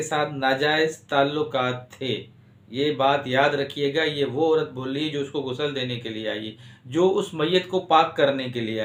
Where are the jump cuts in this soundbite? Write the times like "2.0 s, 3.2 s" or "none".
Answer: none